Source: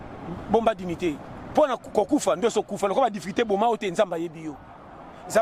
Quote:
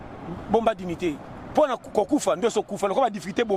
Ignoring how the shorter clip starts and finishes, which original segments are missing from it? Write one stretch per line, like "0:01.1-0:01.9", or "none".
none